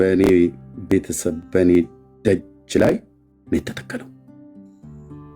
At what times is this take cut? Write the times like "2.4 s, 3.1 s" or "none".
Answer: 4.1 s